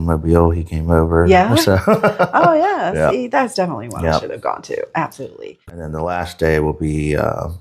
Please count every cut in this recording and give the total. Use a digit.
1